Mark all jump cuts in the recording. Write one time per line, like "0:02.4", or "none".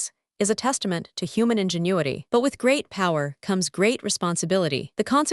0:02.2

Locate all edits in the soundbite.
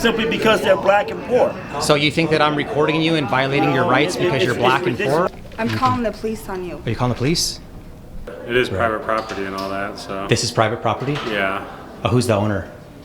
0:05.3
0:08.3

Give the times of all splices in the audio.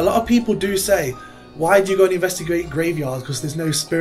none

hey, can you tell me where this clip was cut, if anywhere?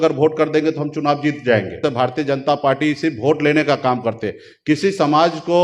0:01.8

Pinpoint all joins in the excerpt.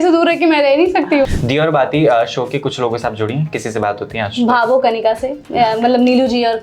0:01.3

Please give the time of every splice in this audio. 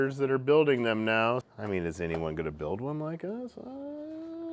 0:01.5

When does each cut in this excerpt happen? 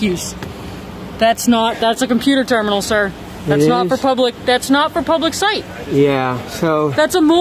none

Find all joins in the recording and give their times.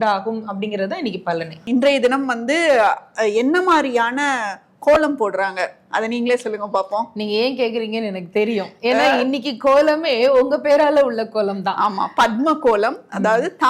0:01.6

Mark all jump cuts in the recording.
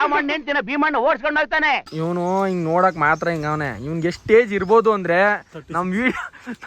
0:01.8

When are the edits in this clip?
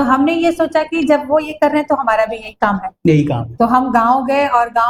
none

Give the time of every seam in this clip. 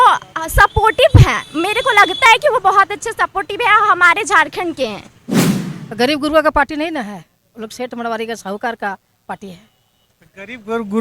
0:05.5

